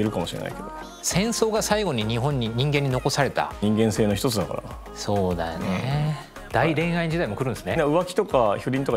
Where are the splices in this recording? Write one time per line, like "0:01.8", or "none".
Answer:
0:03.6
0:06.3
0:07.8